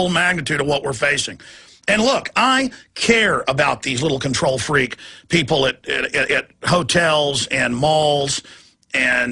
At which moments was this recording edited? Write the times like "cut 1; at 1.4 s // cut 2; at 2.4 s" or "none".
none